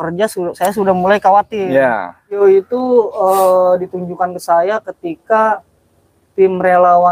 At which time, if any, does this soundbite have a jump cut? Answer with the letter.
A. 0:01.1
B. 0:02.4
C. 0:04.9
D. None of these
B